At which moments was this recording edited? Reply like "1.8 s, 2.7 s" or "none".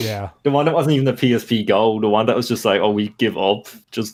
none